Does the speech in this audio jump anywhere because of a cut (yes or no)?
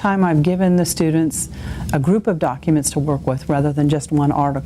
no